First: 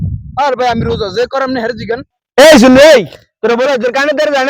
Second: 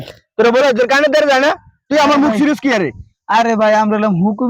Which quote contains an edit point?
first; 1 cut; at 2.1 s

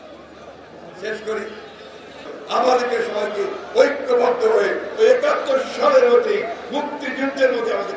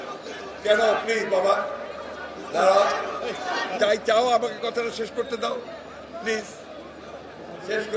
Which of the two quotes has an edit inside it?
first; 1 cut; at 2.3 s

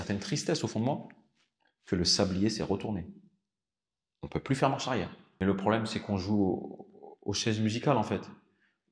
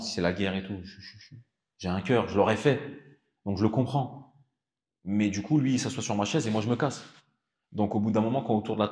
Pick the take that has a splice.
first; 1 cut; at 5.2 s

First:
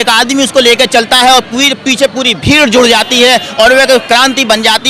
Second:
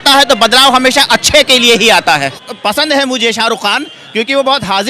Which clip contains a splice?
second; 1 cut; at 2.5 s

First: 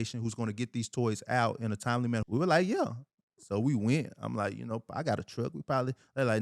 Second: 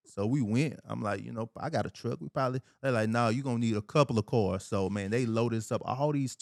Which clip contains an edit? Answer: first; 1 cut; at 2.2 s

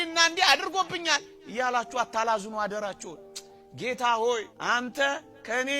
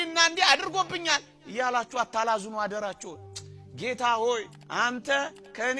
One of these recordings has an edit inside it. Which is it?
first; 1 cut; at 4.5 s

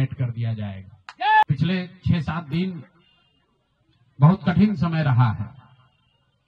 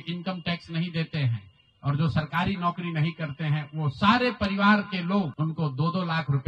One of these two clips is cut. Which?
first; 1 cut; at 1.4 s

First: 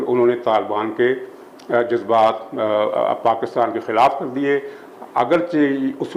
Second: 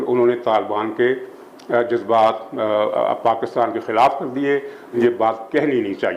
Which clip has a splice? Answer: second; 1 cut; at 4.9 s

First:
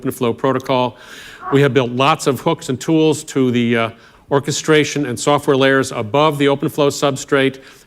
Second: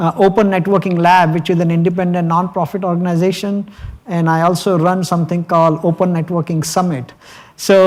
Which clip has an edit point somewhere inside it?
first; 1 cut; at 6.5 s

